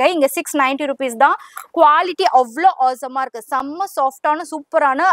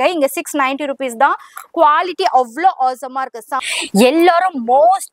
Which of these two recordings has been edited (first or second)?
second